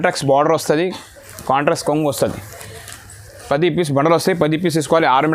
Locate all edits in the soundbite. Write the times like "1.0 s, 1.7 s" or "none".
none